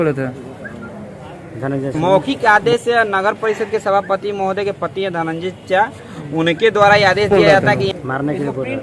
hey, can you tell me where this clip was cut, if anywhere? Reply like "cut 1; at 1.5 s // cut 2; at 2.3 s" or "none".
cut 1; at 1.9 s // cut 2; at 7.9 s